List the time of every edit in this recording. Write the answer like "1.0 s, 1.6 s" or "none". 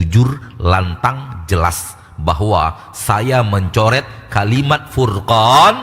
none